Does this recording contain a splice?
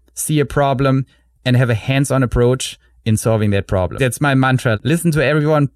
yes; 2 cuts; at 3.9 s, 4.8 s

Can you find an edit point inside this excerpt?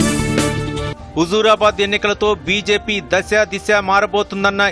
no; 0 cuts

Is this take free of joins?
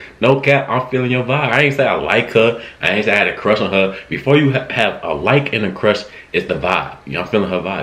yes; 0 cuts

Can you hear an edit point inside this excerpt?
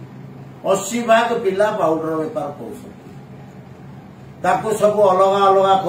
no; 0 cuts

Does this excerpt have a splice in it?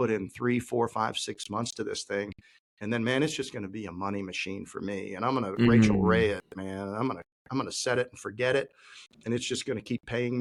no; 0 cuts

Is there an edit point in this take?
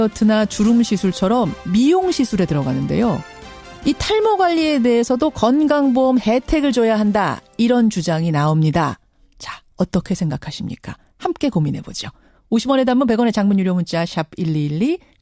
no; 0 cuts

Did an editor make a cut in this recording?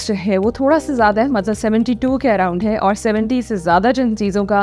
no; 0 cuts

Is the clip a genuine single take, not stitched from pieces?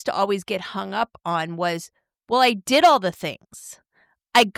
yes; 0 cuts

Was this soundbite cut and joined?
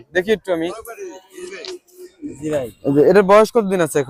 no; 0 cuts

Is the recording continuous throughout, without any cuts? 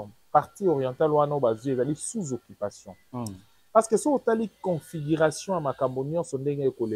yes; 0 cuts

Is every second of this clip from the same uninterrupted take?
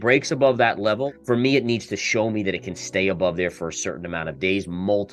no; 1 cut; at 1.1 s

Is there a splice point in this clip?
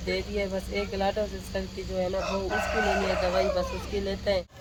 no; 0 cuts

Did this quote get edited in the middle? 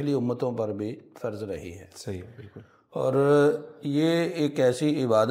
no; 0 cuts

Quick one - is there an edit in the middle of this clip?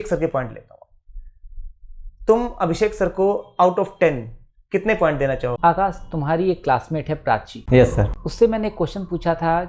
yes; 1 cut; at 5.5 s

